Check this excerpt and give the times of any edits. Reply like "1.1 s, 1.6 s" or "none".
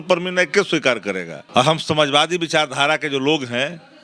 1.3 s